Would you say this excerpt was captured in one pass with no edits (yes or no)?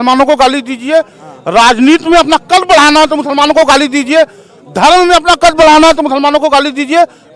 yes